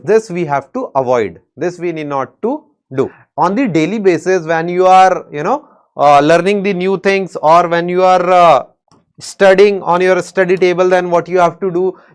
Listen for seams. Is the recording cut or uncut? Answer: cut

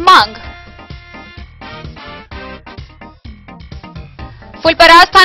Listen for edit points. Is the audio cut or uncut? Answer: uncut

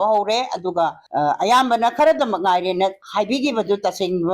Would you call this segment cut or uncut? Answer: cut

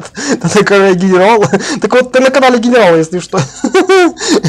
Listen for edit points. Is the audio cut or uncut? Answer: uncut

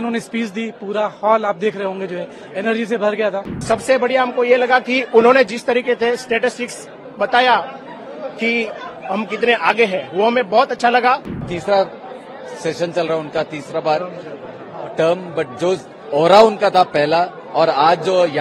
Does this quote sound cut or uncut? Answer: cut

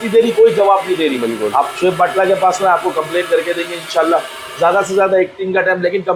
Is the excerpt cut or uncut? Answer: uncut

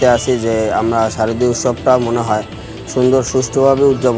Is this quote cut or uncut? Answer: uncut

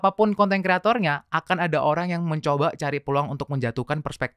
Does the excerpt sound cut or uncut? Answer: uncut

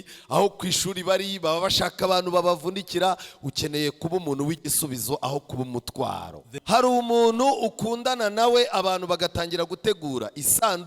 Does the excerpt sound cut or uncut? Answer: cut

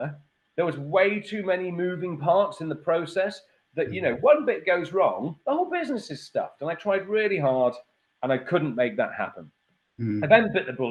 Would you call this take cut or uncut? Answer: uncut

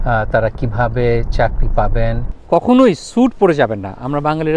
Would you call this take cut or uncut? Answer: cut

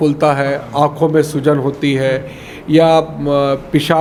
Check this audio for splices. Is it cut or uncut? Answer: uncut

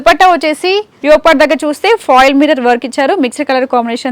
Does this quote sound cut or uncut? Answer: cut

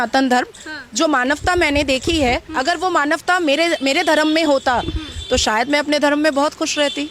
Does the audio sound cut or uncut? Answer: uncut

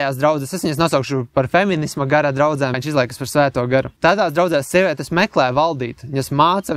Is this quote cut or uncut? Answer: cut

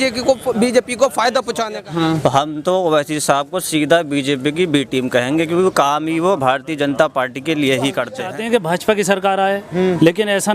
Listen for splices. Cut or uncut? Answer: cut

